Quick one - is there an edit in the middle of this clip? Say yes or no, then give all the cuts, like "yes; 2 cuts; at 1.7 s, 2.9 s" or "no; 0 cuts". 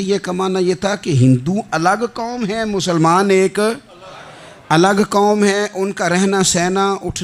no; 0 cuts